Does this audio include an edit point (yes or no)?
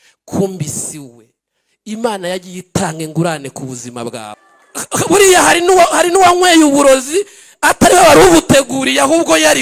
yes